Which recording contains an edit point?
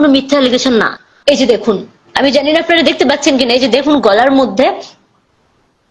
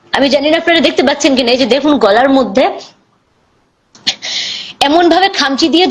first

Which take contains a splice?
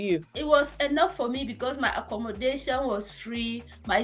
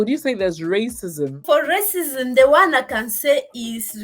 second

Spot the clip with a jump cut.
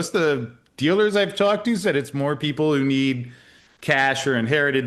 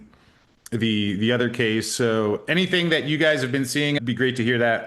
second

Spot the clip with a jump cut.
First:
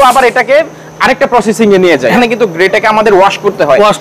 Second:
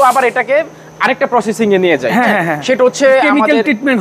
first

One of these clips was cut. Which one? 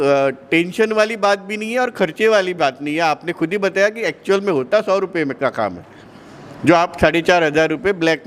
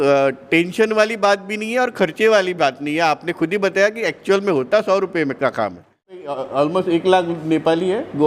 second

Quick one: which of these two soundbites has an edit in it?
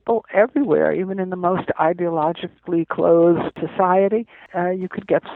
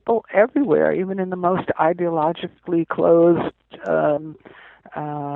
first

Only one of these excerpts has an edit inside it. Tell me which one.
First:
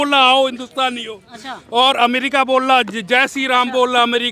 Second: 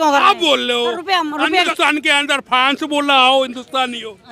second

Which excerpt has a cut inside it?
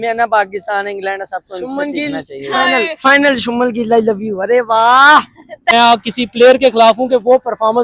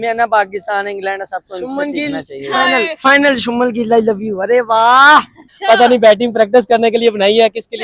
first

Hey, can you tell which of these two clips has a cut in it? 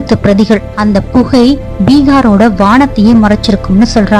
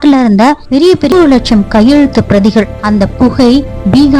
second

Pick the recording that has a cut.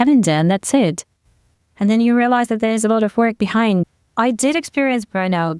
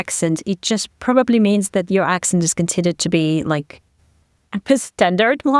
first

